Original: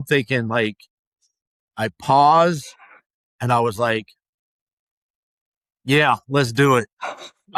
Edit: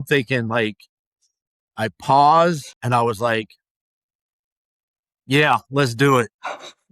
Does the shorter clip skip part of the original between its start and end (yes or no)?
yes